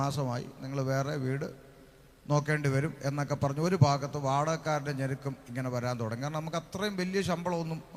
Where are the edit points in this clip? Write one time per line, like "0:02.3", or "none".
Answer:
none